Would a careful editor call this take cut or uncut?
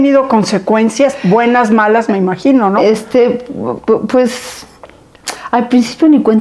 uncut